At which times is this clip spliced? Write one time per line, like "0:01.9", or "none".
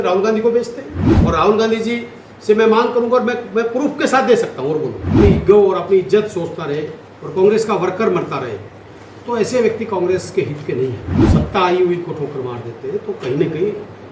0:01.1
0:05.2
0:11.1